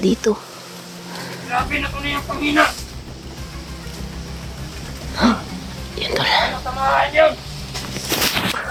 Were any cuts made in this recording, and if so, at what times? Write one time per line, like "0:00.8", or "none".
none